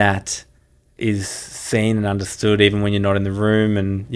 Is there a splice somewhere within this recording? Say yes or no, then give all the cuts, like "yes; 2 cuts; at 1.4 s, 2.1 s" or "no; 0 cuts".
no; 0 cuts